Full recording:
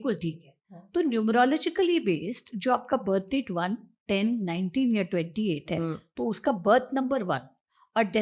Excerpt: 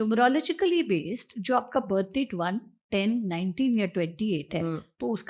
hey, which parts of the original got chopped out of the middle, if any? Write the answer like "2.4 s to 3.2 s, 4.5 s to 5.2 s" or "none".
none